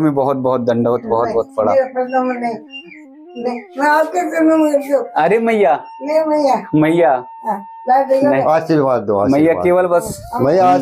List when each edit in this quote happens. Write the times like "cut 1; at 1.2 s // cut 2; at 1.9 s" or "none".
none